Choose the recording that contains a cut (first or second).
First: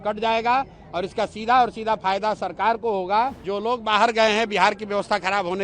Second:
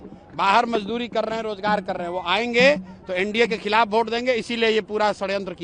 first